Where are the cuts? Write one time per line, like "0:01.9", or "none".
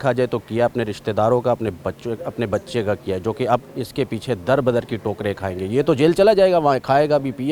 none